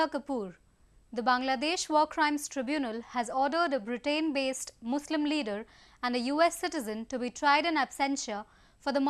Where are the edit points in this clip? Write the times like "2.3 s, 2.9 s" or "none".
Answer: 1.4 s